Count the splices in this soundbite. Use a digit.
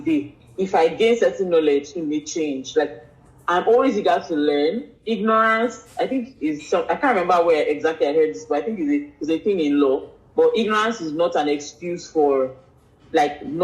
0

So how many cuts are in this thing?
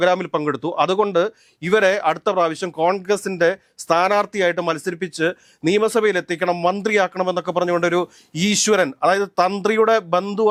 0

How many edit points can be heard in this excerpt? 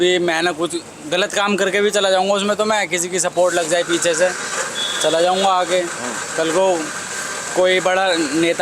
0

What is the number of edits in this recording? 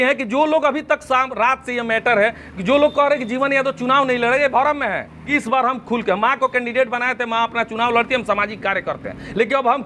1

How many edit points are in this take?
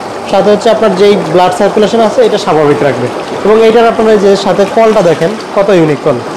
0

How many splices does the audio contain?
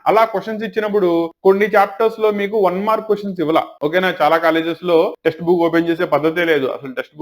1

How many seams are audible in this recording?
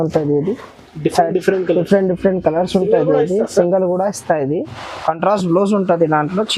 1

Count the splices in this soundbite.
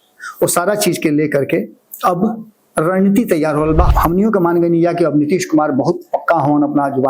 1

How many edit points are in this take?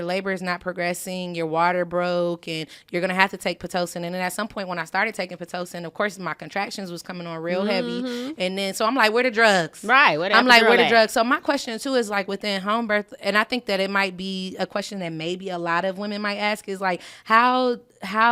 0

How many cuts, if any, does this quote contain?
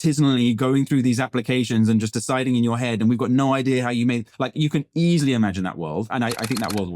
0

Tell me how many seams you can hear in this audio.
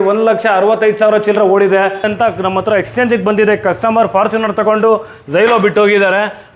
1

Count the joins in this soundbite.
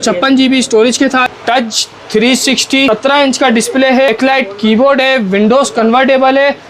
3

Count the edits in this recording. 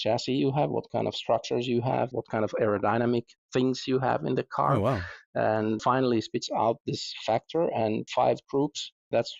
3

